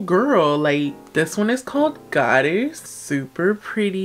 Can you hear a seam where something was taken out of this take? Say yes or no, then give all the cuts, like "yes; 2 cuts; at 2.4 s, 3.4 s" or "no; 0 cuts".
no; 0 cuts